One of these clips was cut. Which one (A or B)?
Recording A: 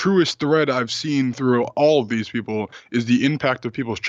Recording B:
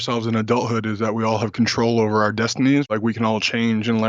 B